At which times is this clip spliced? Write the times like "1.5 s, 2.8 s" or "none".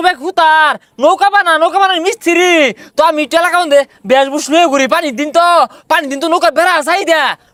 none